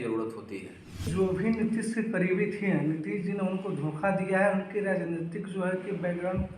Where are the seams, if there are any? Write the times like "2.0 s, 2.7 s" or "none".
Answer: 1.0 s

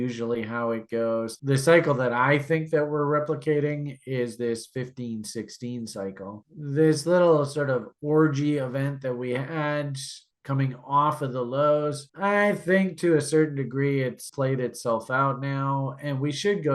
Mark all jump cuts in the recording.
1.4 s

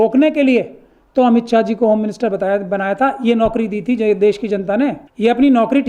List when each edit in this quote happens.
none

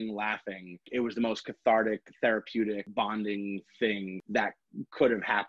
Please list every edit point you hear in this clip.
0.9 s, 2.9 s, 4.2 s

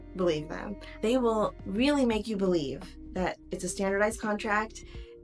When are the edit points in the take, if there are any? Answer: 1.0 s

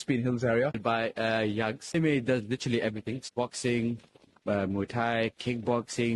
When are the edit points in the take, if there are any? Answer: 0.8 s, 1.9 s, 3.3 s

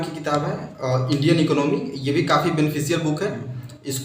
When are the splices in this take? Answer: none

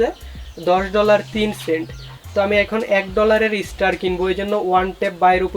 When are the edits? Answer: none

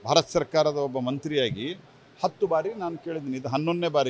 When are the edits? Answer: 2.9 s

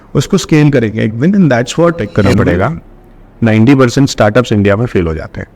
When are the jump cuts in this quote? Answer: 2.3 s

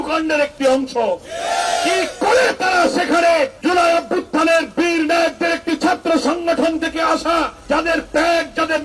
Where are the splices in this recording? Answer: 3.5 s, 7.6 s

